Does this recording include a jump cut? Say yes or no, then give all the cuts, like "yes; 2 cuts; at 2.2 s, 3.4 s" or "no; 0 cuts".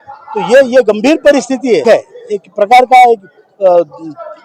yes; 1 cut; at 1.8 s